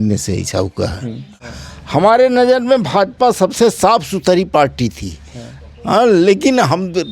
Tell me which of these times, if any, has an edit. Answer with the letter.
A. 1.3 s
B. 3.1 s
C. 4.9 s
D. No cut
A